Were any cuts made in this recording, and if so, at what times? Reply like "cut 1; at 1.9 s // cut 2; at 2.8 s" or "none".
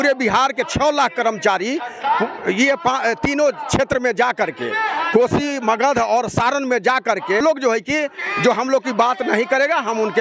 cut 1; at 7.4 s